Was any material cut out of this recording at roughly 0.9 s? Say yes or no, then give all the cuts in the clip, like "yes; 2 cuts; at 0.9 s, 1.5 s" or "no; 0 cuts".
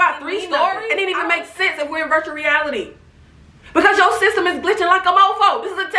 yes; 1 cut; at 0.9 s